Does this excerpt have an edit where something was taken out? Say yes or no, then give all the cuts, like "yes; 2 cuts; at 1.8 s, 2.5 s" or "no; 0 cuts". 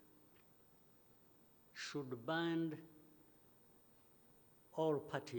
no; 0 cuts